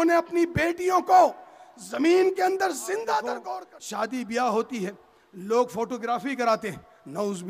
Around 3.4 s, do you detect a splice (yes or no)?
yes